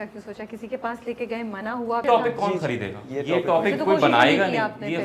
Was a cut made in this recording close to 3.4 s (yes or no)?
no